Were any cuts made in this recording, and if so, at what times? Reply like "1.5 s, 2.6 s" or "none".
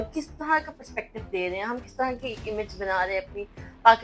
none